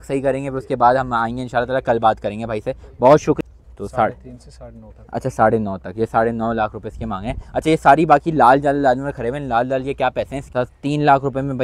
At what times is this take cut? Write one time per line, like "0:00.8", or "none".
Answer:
0:03.4
0:10.5